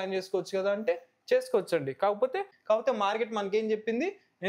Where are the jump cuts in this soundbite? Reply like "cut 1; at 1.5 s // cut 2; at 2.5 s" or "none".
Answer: cut 1; at 2.5 s